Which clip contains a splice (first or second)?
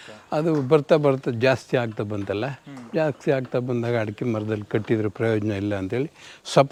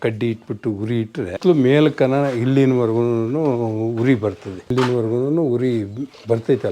second